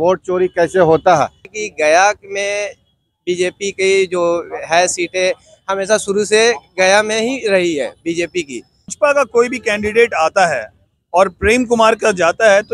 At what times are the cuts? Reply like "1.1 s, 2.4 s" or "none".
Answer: 1.5 s, 8.9 s